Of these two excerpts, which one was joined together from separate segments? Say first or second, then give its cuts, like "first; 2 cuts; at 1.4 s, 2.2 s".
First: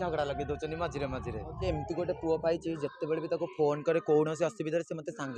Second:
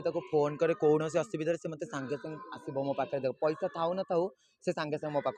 first; 1 cut; at 1.7 s